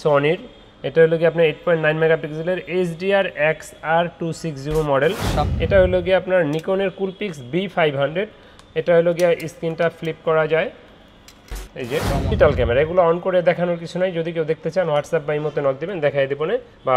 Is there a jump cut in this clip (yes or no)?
yes